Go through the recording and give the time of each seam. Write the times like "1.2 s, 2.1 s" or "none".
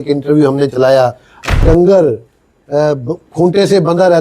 1.6 s